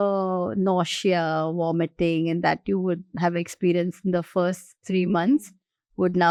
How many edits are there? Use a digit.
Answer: 0